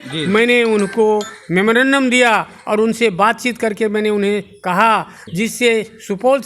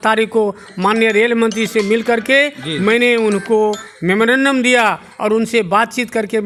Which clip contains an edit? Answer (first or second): first